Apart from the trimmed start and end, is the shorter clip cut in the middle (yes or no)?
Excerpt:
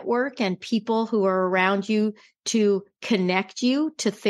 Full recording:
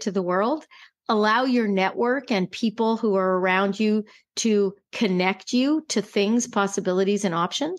no